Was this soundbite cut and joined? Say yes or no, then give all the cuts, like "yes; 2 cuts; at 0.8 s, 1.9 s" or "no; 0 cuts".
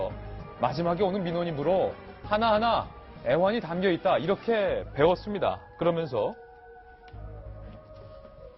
yes; 1 cut; at 4.1 s